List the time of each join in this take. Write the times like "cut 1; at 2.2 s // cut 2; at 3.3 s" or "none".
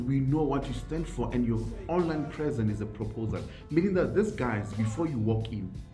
none